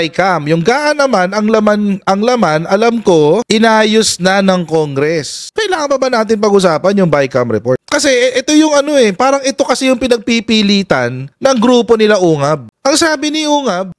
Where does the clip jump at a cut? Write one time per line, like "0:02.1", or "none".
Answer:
0:05.5